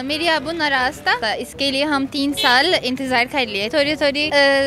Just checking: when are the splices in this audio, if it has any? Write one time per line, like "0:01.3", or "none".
0:01.2
0:03.8